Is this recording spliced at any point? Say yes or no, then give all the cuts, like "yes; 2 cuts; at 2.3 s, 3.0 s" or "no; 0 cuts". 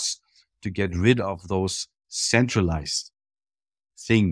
no; 0 cuts